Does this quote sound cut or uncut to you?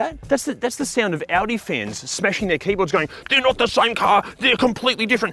uncut